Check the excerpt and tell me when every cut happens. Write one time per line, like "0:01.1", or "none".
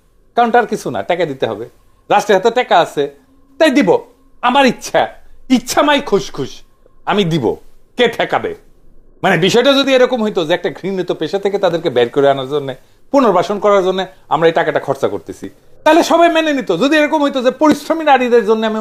none